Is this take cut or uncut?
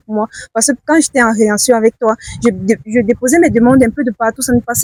uncut